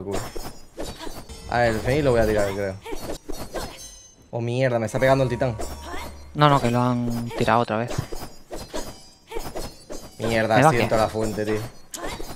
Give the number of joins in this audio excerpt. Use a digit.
2